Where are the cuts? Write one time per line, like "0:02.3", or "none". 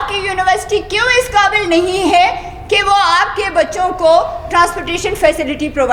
none